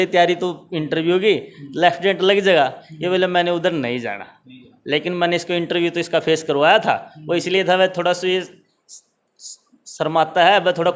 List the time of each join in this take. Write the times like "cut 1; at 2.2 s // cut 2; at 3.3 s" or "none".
none